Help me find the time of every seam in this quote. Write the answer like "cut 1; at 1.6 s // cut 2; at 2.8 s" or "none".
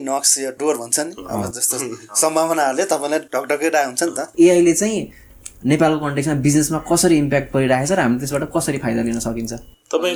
none